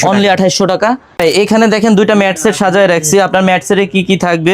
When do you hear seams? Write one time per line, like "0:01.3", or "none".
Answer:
0:01.1